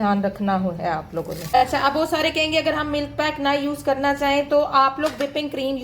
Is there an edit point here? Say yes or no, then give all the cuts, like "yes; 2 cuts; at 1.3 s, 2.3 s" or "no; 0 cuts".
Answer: yes; 1 cut; at 1.5 s